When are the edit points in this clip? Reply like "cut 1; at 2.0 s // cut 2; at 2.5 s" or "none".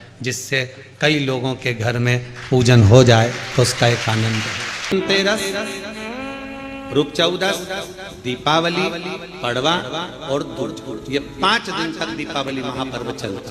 cut 1; at 4.9 s